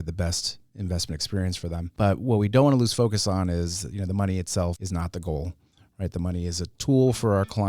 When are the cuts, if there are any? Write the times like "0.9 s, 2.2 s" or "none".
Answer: 1.9 s, 4.8 s